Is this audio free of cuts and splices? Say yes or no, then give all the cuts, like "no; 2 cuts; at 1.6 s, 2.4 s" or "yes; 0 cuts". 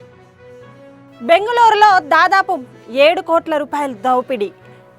no; 1 cut; at 1.0 s